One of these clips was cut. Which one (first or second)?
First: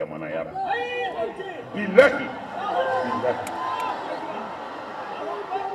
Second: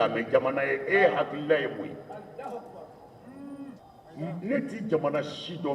second